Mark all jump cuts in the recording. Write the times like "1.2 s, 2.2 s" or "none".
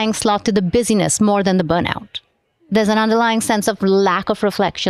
none